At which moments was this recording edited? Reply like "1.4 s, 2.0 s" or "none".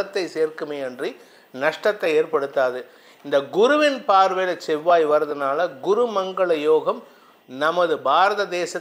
none